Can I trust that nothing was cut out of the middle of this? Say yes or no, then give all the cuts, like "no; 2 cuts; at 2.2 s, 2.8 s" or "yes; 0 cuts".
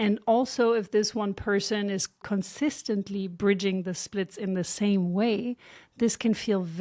no; 1 cut; at 2.2 s